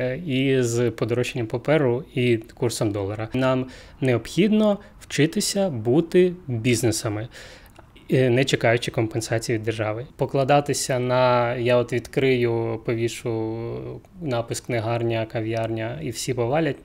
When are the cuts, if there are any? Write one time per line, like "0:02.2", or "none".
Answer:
0:03.3
0:10.0